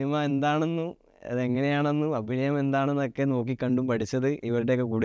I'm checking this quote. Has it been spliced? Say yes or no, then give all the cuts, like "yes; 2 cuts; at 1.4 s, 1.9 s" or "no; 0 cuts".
no; 0 cuts